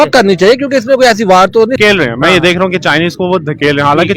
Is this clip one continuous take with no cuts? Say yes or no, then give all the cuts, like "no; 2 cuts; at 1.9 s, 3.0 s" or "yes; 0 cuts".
no; 1 cut; at 1.7 s